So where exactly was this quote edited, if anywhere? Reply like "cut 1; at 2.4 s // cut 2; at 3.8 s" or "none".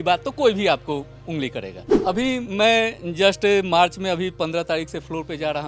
cut 1; at 1.8 s